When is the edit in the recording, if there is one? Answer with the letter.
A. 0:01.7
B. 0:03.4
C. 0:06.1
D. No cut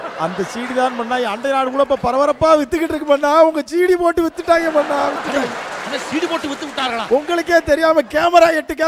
D